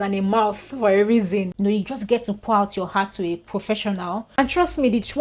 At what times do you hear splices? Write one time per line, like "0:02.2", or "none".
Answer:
0:01.5
0:04.2